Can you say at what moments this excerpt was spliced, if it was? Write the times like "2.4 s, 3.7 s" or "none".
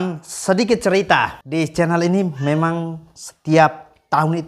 1.4 s